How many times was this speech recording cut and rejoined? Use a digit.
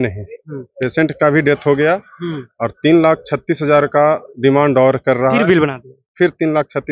0